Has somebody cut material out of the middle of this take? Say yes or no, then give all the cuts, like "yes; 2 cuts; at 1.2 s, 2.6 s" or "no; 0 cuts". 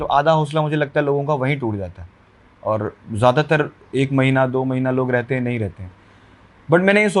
no; 0 cuts